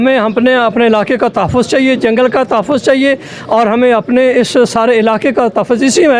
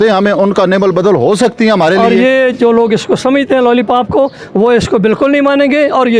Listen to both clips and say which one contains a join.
second; 1 cut; at 2.0 s

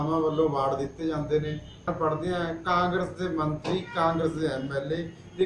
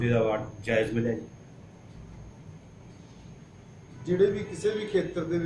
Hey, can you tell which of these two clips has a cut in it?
first; 1 cut; at 1.9 s

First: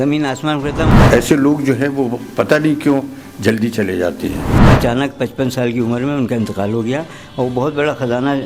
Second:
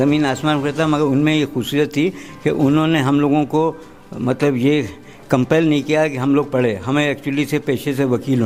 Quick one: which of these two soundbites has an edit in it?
first; 2 cuts; at 0.9 s, 4.6 s

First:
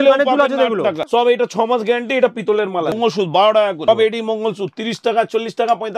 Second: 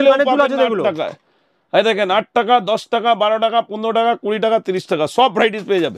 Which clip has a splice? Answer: first; 3 cuts; at 1.1 s, 2.9 s, 3.9 s

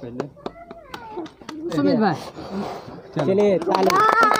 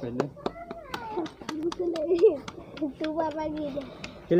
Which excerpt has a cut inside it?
first; 1 cut; at 1.7 s

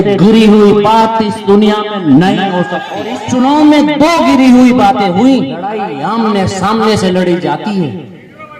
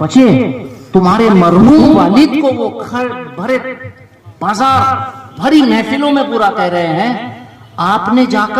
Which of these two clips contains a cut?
first; 2 cuts; at 3.1 s, 5.9 s

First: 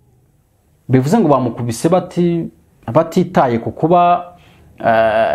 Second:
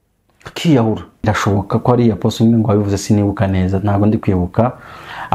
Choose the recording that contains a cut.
second; 1 cut; at 1.3 s

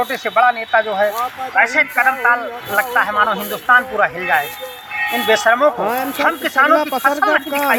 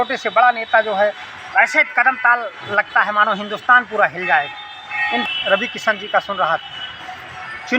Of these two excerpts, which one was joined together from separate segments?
second; 1 cut; at 5.2 s

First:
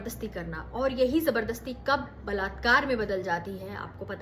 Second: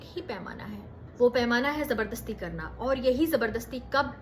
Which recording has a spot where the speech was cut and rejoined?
second; 1 cut; at 1.0 s

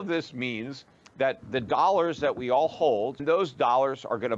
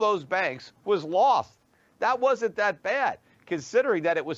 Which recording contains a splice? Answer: first; 1 cut; at 3.2 s

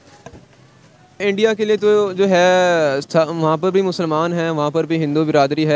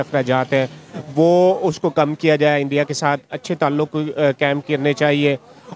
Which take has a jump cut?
first; 1 cut; at 1.2 s

